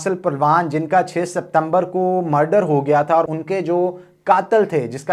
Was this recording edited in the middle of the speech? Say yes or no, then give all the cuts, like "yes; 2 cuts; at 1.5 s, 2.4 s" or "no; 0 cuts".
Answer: yes; 1 cut; at 3.3 s